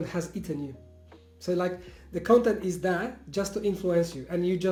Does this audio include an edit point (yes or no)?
no